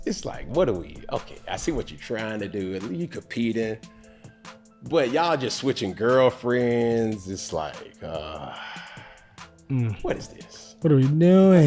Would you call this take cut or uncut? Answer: uncut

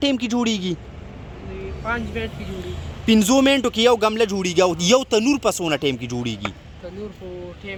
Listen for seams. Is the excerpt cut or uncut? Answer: uncut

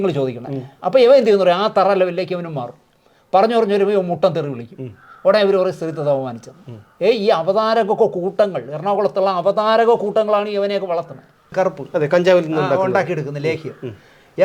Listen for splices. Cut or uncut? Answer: cut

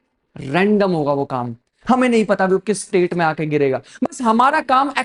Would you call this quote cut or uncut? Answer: uncut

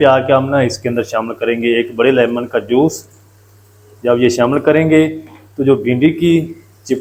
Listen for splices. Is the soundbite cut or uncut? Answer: uncut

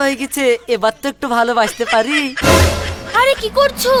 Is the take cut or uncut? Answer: uncut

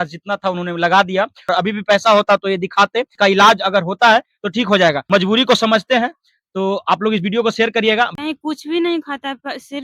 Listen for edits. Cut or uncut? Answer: cut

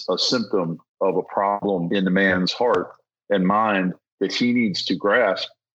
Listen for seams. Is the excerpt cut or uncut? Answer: cut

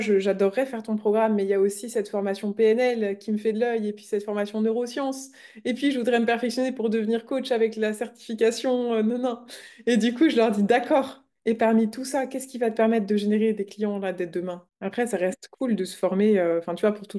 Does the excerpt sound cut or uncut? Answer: uncut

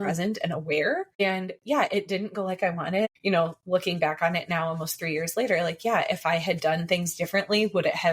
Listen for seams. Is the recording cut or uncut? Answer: cut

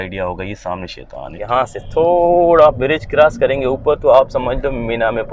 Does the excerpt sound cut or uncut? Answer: cut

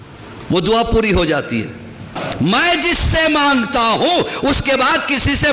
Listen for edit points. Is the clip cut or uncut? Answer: cut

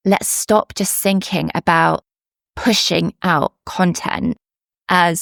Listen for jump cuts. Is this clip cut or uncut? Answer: uncut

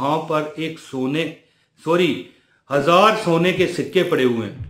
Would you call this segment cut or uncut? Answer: uncut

